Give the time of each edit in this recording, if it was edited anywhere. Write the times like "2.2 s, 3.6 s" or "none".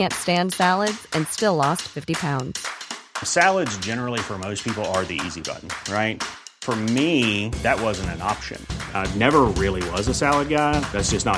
none

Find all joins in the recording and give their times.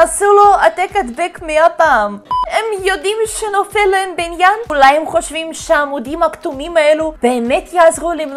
2.4 s, 4.7 s

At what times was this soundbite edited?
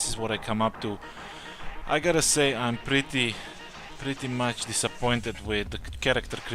4.4 s

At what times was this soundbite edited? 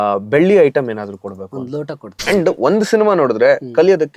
2.1 s

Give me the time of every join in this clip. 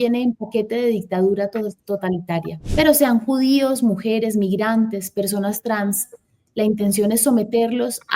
2.6 s

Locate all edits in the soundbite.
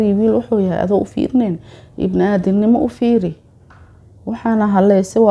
none

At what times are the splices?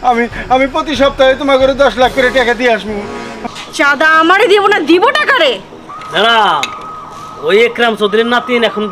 3.4 s

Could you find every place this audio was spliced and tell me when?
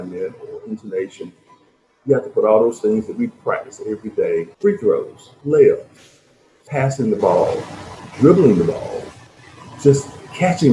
4.5 s, 5.2 s

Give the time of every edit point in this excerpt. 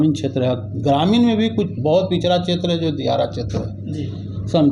none

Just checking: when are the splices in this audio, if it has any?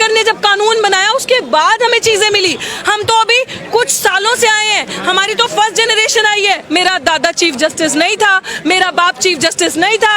6.6 s

